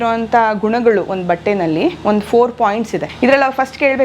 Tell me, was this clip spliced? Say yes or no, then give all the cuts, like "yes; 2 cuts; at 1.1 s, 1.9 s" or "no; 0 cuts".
yes; 1 cut; at 3.0 s